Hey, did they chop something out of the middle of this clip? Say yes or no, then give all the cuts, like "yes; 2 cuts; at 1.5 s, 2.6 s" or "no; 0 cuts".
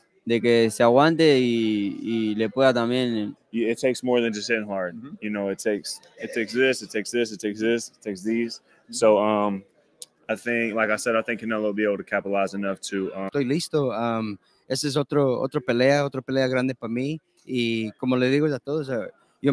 yes; 2 cuts; at 3.4 s, 13.3 s